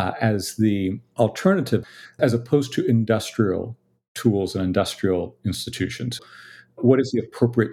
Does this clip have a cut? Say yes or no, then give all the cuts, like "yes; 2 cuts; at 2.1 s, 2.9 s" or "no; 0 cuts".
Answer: yes; 3 cuts; at 1.0 s, 2.1 s, 6.2 s